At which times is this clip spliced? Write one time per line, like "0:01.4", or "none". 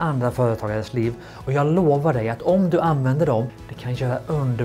0:03.6